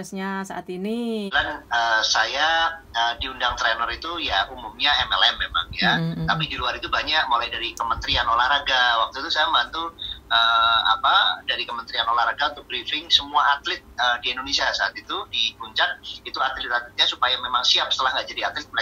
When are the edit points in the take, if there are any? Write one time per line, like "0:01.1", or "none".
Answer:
0:01.3